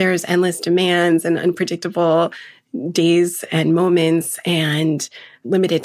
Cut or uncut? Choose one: uncut